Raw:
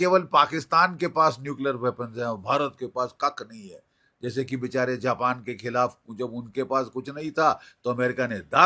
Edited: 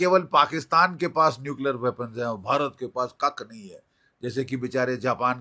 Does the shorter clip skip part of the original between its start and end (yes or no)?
no